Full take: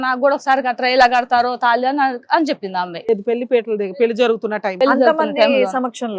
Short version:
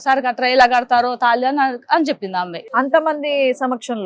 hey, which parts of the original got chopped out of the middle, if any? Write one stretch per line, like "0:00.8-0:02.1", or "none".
0:03.0-0:04.7